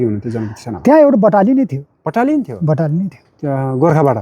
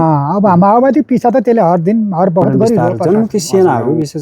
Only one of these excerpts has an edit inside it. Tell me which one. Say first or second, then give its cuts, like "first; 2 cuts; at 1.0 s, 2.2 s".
second; 1 cut; at 3.0 s